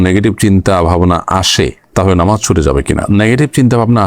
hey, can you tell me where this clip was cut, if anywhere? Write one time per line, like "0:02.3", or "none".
none